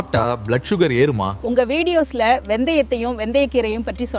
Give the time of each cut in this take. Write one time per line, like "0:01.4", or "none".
0:01.3

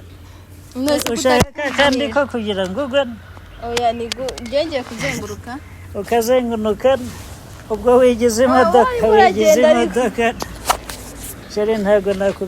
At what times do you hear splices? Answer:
none

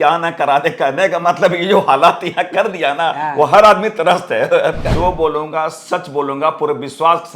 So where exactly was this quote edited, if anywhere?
0:04.9

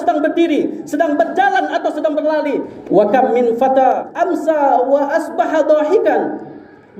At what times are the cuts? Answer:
0:02.7
0:04.1

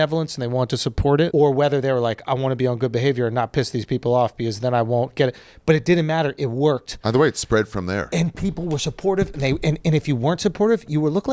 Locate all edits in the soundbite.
0:01.3

